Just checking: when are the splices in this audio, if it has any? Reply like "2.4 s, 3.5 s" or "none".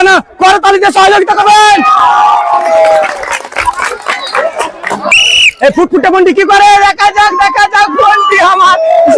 5.1 s